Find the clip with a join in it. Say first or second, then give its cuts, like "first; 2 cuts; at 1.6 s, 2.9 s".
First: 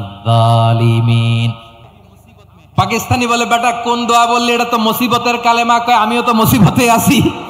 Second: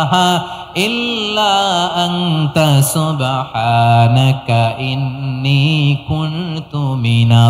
first; 1 cut; at 1.7 s